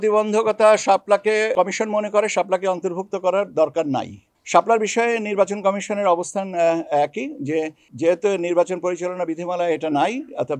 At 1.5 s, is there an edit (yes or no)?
yes